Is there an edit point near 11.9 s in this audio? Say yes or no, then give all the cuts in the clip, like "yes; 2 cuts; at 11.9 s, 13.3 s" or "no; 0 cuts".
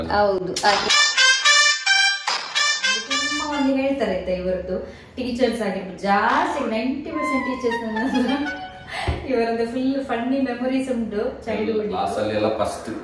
yes; 2 cuts; at 3.2 s, 11.9 s